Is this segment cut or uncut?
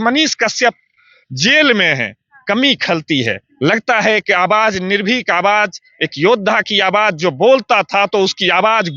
uncut